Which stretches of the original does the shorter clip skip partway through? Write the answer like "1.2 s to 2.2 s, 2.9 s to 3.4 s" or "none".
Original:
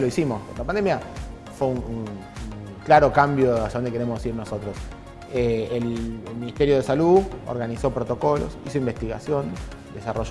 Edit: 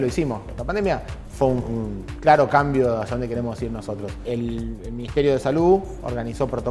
1.2 s to 1.4 s, 2.3 s to 2.7 s, 4.9 s to 5.7 s